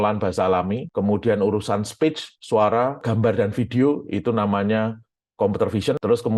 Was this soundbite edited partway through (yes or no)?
no